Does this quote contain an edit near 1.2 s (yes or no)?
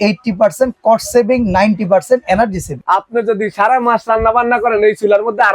no